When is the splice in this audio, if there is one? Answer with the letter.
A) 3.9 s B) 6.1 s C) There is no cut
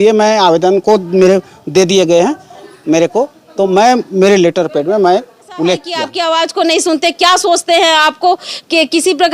B